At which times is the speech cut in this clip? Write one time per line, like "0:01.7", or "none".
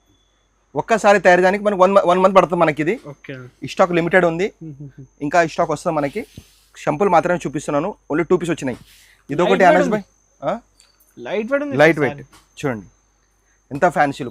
none